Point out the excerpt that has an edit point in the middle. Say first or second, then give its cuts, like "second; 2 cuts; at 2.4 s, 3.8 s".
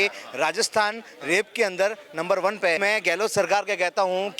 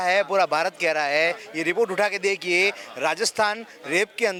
first; 1 cut; at 2.8 s